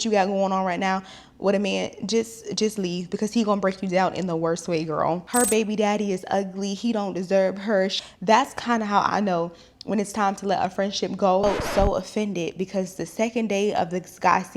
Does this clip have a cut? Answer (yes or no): yes